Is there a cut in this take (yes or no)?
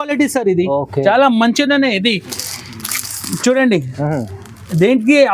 no